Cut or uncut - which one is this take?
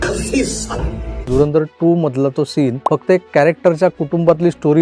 cut